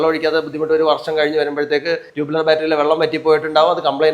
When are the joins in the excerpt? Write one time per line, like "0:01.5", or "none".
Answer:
0:02.1